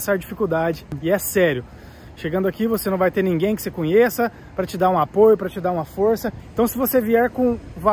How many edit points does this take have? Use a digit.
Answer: 1